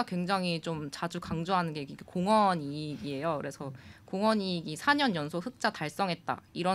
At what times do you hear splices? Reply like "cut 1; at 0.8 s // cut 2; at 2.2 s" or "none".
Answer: none